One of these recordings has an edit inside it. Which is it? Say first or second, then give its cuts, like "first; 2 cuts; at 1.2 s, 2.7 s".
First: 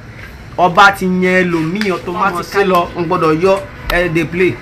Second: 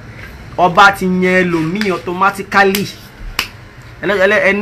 first; 1 cut; at 2.4 s